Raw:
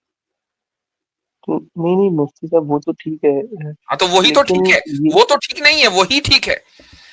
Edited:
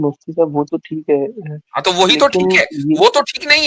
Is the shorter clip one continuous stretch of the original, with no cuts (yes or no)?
yes